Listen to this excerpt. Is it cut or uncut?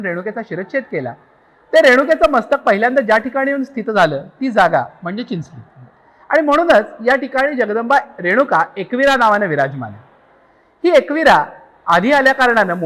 uncut